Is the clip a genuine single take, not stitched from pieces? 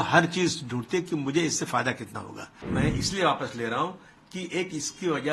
no; 1 cut; at 2.5 s

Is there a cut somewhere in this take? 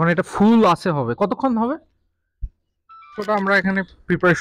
yes; 1 cut; at 3.1 s

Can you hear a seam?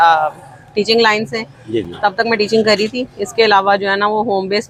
no; 0 cuts

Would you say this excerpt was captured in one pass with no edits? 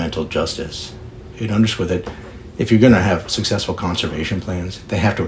yes; 0 cuts

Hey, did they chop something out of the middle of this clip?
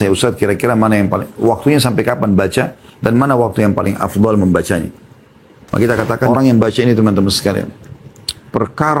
yes; 1 cut; at 6.3 s

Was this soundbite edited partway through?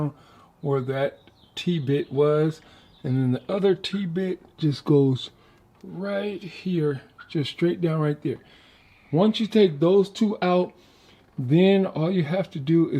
no; 0 cuts

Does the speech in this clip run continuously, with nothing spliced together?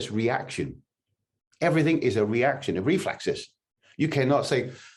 yes; 0 cuts

